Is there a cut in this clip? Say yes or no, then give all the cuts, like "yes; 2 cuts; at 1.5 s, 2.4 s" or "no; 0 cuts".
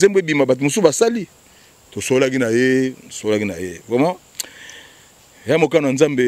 no; 0 cuts